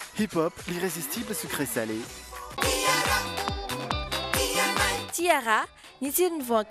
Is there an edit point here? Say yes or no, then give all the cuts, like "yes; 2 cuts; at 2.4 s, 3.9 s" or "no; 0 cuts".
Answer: yes; 1 cut; at 2.5 s